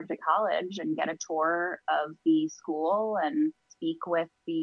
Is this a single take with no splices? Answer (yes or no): no